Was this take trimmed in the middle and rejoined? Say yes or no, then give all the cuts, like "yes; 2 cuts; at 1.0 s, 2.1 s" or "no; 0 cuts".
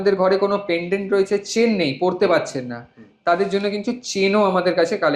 no; 0 cuts